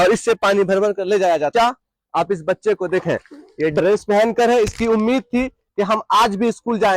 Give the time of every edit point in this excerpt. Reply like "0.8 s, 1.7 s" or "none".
1.5 s